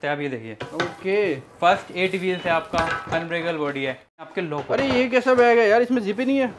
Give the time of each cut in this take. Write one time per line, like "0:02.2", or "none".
0:04.1